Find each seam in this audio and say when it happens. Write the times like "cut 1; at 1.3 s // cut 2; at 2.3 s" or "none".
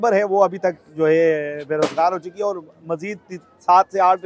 none